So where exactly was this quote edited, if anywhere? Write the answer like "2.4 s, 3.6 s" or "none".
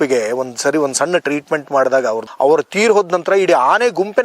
2.3 s